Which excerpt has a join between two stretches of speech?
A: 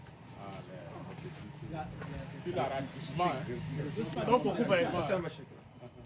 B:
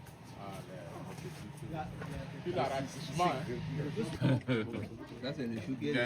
B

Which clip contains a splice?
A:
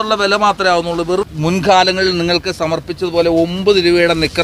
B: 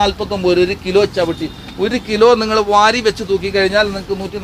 A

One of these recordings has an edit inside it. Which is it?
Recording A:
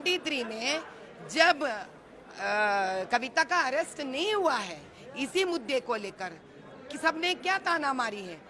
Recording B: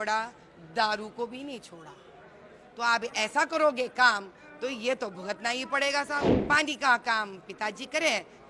B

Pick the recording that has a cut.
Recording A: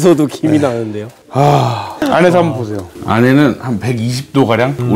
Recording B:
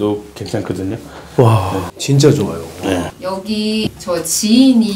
B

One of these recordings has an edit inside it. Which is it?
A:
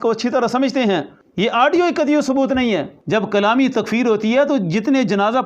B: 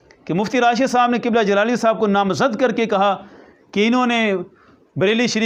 A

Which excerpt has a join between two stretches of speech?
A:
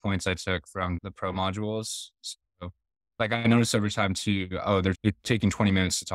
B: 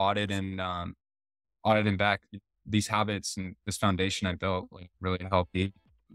A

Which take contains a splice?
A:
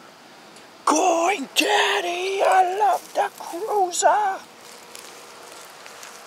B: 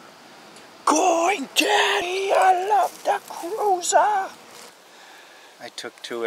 B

